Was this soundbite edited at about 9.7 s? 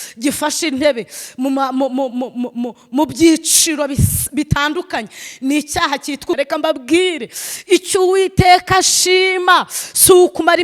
no; 1 cut; at 6.4 s

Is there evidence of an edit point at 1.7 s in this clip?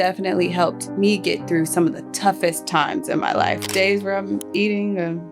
no; 1 cut; at 3.6 s

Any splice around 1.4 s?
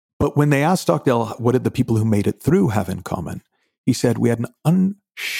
yes; 1 cut; at 1.4 s

